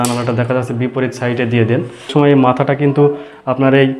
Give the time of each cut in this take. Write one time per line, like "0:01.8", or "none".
0:02.1